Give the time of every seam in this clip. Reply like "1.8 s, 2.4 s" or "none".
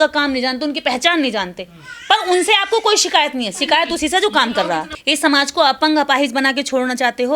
4.9 s